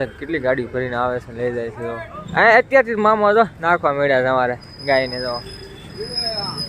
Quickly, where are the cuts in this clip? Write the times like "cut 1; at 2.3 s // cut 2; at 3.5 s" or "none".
cut 1; at 2.2 s